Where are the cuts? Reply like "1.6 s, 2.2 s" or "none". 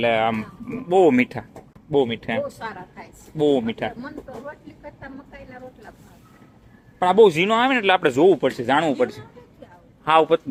none

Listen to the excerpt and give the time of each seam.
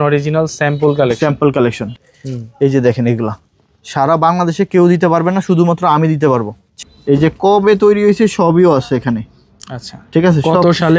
1.9 s, 6.6 s

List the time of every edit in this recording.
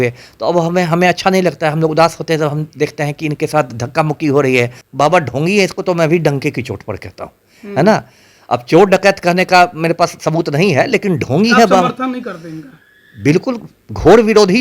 4.8 s

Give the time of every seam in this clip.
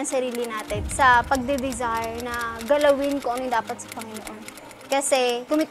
none

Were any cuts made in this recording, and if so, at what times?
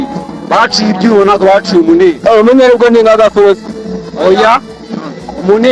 none

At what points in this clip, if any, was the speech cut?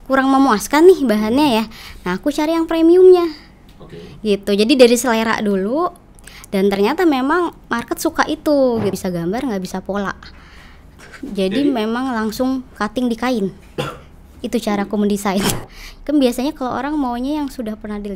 9.0 s, 15.6 s

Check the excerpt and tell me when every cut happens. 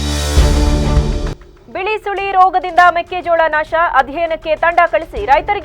1.3 s

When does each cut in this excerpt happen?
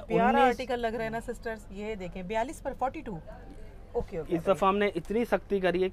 none

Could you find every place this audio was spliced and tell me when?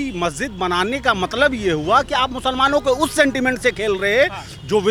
none

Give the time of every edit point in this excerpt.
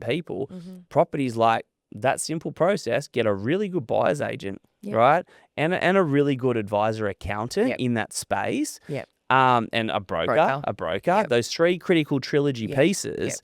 none

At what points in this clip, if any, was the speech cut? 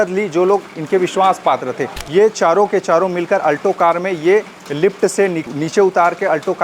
1.9 s, 5.4 s

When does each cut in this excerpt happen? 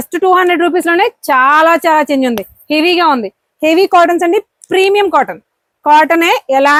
none

